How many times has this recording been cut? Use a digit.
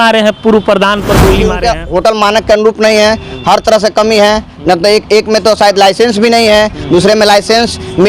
1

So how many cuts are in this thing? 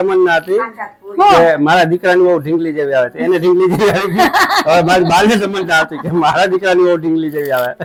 0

